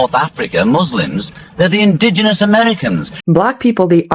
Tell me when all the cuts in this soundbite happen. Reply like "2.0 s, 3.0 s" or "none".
3.1 s